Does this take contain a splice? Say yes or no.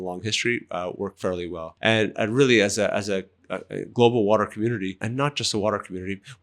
yes